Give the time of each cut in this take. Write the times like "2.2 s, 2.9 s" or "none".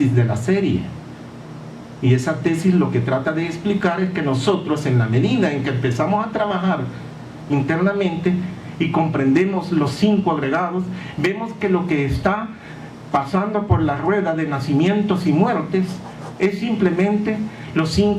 5.0 s